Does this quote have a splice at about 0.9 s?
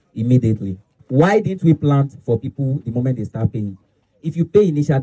yes; 1 cut; at 0.9 s

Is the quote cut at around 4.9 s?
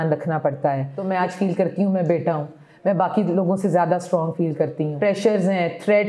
yes; 2 cuts; at 1.0 s, 4.9 s

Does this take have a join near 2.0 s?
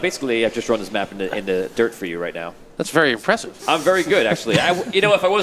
no; 0 cuts

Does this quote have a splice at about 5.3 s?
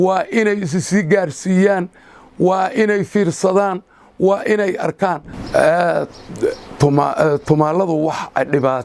yes; 1 cut; at 5.3 s

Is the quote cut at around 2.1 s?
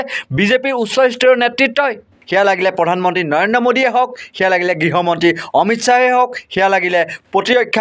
yes; 1 cut; at 2.1 s

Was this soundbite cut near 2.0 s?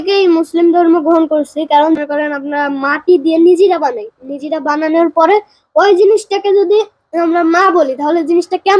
yes; 1 cut; at 2.0 s

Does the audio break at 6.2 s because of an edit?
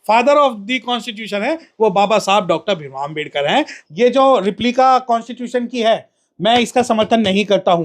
no; 1 cut; at 3.8 s

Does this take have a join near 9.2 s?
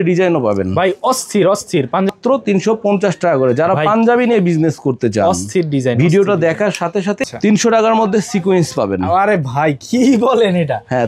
no; 2 cuts; at 2.1 s, 7.2 s

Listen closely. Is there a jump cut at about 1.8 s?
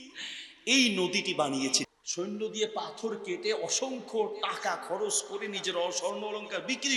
yes; 1 cut; at 1.8 s

